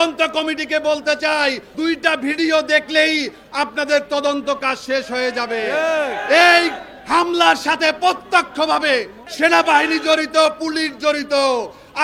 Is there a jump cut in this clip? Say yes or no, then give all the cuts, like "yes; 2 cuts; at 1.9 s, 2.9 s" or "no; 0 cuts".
yes; 2 cuts; at 1.7 s, 9.2 s